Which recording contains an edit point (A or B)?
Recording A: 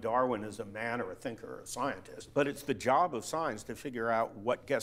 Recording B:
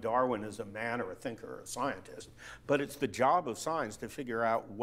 A